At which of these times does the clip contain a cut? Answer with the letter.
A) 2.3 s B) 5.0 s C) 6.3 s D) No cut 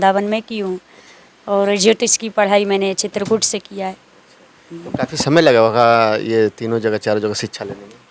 D